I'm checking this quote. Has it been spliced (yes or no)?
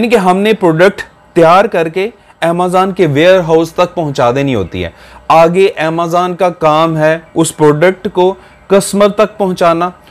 no